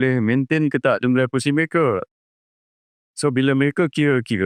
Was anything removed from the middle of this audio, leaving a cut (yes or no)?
no